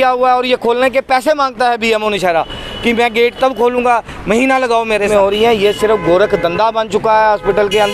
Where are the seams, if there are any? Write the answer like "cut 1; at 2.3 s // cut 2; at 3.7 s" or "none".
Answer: cut 1; at 5.1 s